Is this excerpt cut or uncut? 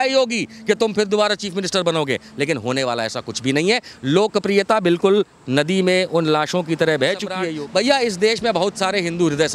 cut